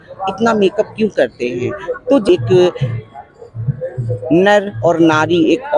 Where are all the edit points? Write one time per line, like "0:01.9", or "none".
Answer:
0:02.3